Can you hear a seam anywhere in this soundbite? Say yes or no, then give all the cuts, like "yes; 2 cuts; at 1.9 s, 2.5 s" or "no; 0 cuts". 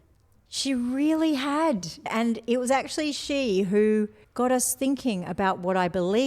yes; 2 cuts; at 2.1 s, 4.2 s